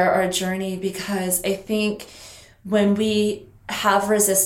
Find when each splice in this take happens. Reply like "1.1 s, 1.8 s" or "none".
none